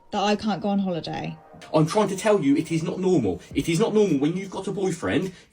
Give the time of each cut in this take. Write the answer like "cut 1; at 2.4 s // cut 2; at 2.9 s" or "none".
cut 1; at 1.6 s